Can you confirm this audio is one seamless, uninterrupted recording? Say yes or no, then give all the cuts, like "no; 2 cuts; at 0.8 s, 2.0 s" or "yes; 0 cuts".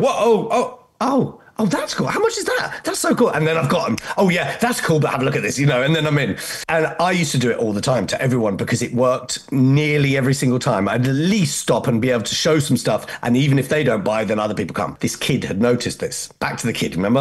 no; 2 cuts; at 6.5 s, 14.9 s